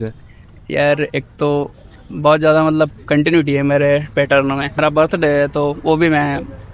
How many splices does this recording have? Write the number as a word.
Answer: one